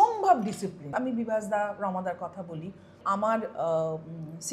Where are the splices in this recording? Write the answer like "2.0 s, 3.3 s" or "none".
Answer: 0.9 s, 3.0 s